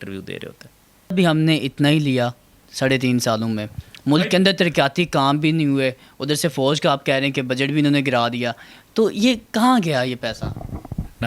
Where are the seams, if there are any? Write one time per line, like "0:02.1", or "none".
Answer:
0:01.1